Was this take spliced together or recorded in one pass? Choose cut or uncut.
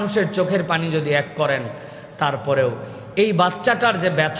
uncut